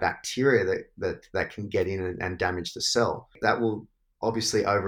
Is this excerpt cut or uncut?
cut